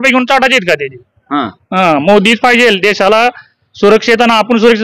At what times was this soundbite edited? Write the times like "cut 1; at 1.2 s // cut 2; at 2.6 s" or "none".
none